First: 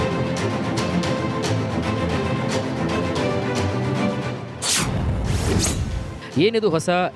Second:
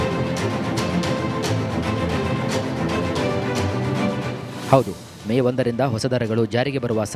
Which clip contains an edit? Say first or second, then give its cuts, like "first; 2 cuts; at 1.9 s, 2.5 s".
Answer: second; 1 cut; at 4.1 s